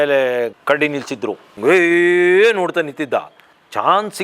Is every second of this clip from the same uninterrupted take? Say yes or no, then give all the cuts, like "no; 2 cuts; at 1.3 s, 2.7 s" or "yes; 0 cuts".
no; 1 cut; at 1.5 s